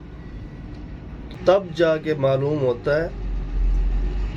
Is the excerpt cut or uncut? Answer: cut